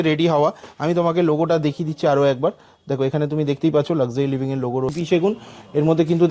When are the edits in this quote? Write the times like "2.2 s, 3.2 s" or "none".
4.9 s